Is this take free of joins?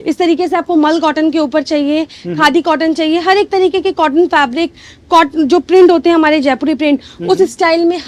yes; 0 cuts

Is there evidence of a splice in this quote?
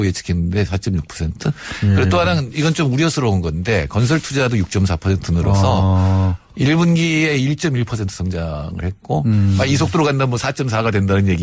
no; 0 cuts

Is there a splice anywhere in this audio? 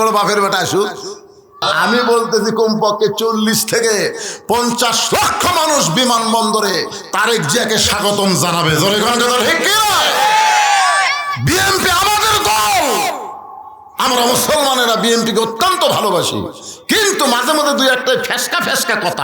yes; 1 cut; at 1.5 s

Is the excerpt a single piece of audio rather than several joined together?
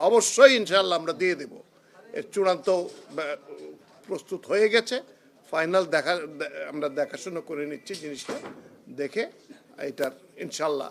yes; 0 cuts

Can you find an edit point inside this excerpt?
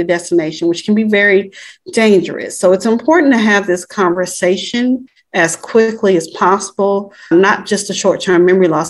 yes; 2 cuts; at 5.2 s, 7.3 s

